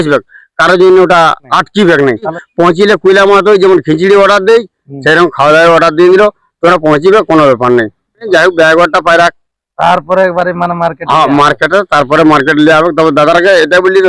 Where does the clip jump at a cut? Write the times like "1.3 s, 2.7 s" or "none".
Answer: 1.4 s, 2.4 s, 8.3 s